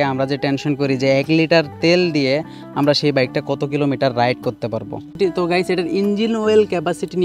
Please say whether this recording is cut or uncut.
cut